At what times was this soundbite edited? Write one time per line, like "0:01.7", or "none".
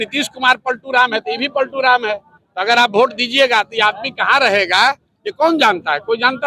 none